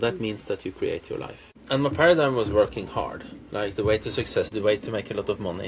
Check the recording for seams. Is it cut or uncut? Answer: cut